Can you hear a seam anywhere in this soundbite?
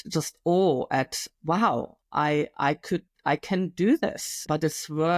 yes; 1 cut; at 4.3 s

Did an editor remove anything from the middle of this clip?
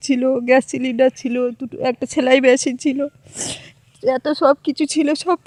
no; 0 cuts

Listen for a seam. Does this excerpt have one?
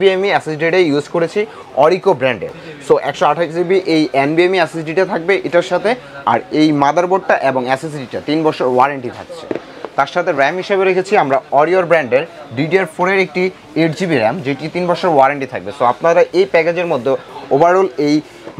no; 0 cuts

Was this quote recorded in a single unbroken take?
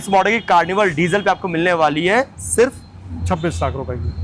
yes; 0 cuts

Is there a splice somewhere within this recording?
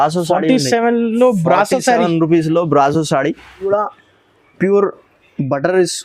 yes; 1 cut; at 3.2 s

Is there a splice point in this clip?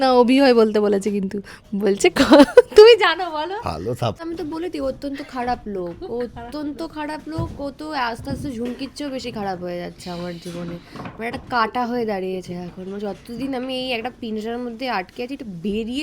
yes; 1 cut; at 4.2 s

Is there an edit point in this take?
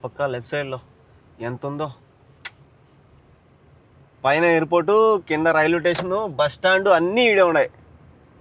no; 0 cuts

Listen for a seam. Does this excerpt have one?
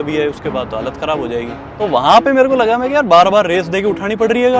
yes; 1 cut; at 1.6 s

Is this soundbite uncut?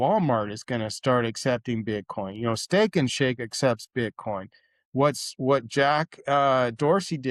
yes; 0 cuts

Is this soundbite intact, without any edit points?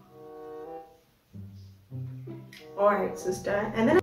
yes; 0 cuts

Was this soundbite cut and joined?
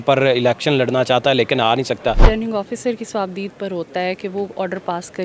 yes; 1 cut; at 2.2 s

